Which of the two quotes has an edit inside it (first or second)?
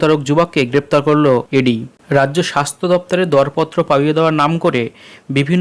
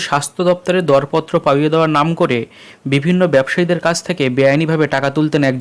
first